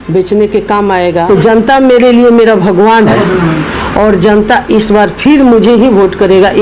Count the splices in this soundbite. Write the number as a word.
two